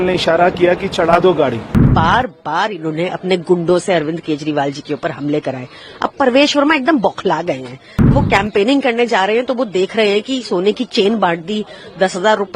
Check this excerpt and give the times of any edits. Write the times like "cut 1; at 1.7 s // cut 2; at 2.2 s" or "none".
cut 1; at 1.9 s // cut 2; at 8.1 s